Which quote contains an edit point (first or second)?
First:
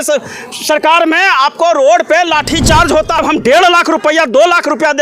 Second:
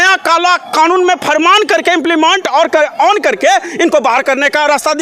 first